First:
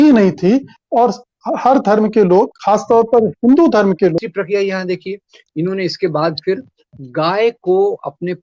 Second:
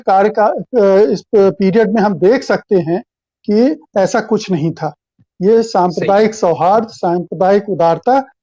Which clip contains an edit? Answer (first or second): first